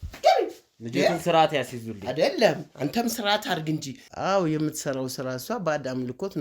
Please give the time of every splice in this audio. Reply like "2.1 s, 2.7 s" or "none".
4.0 s